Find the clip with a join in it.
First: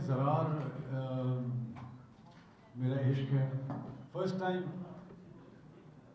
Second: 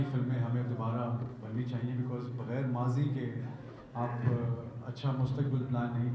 first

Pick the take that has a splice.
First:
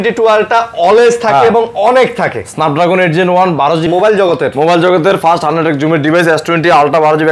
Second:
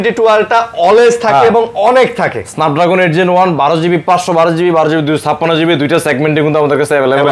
first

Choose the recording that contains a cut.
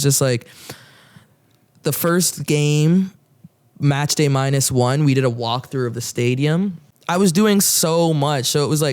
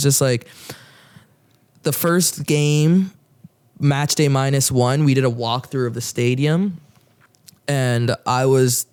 first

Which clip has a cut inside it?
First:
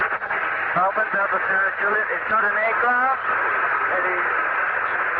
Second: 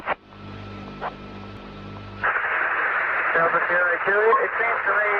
second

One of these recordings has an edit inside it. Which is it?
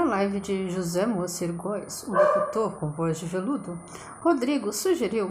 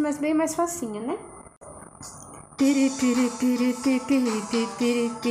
second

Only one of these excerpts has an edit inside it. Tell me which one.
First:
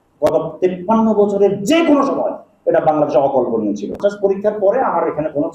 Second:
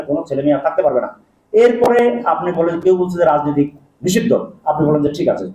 first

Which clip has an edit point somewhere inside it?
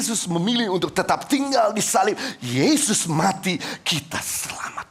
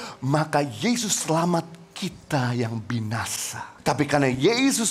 second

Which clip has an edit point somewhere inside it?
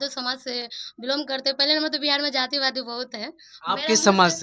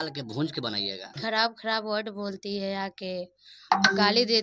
second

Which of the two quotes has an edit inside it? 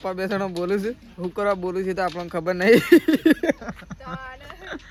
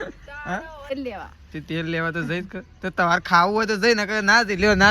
second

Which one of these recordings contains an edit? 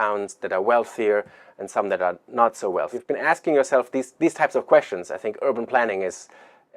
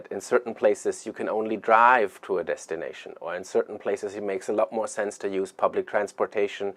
first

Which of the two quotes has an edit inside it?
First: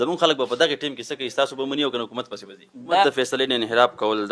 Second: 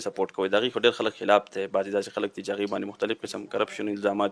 first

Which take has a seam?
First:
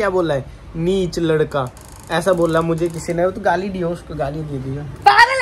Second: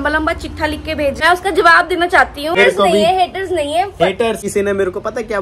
second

